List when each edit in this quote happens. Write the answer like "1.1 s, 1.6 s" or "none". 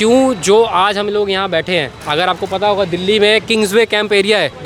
none